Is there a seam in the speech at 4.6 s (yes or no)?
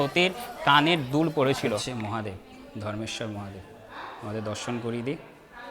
no